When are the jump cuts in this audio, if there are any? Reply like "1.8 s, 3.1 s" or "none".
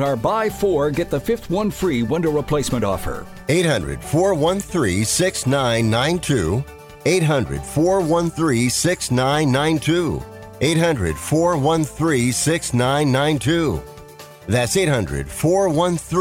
none